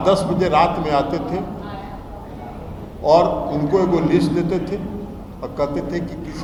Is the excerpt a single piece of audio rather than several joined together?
yes; 0 cuts

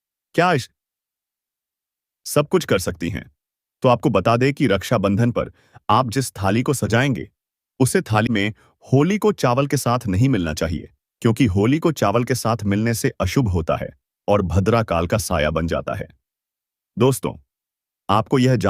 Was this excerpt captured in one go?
no; 1 cut; at 8.3 s

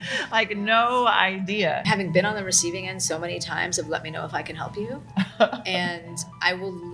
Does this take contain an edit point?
yes; 1 cut; at 1.8 s

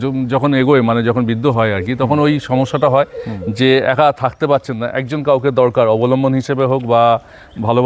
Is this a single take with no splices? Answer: yes; 0 cuts

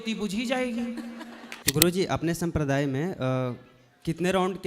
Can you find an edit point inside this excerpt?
yes; 1 cut; at 1.5 s

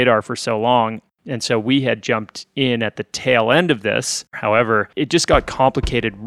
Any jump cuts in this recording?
yes; 2 cuts; at 1.2 s, 4.3 s

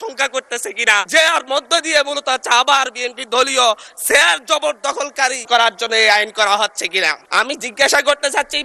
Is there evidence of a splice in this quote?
yes; 3 cuts; at 1.1 s, 5.4 s, 7.2 s

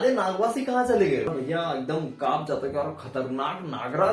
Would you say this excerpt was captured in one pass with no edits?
no; 1 cut; at 1.4 s

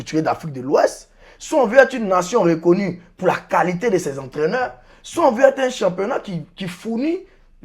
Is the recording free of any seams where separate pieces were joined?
yes; 0 cuts

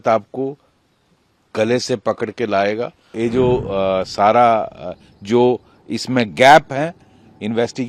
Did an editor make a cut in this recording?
yes; 1 cut; at 3.1 s

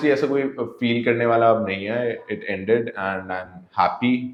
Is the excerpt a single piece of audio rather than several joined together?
yes; 0 cuts

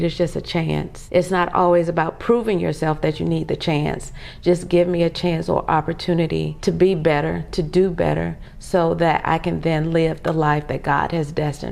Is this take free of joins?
no; 2 cuts; at 0.9 s, 6.5 s

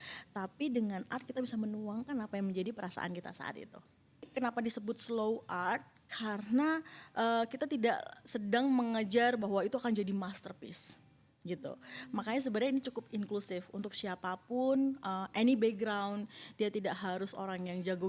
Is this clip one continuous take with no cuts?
no; 1 cut; at 4.3 s

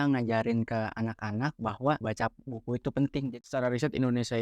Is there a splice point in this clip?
yes; 2 cuts; at 2.0 s, 3.3 s

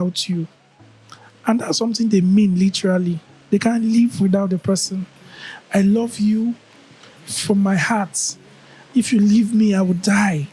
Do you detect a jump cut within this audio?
no; 0 cuts

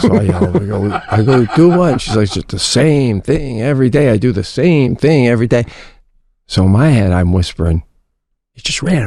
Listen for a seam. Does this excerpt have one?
no; 0 cuts

